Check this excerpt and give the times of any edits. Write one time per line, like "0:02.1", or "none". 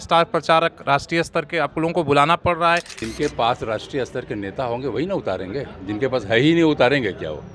0:02.9